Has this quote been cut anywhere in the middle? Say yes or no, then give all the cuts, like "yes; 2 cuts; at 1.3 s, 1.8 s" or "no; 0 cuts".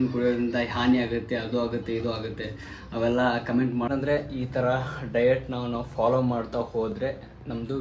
yes; 1 cut; at 3.9 s